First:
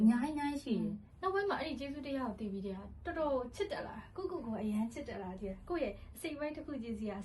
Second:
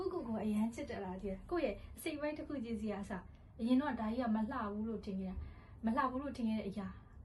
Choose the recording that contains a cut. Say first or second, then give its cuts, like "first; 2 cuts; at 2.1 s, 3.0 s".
first; 1 cut; at 1.0 s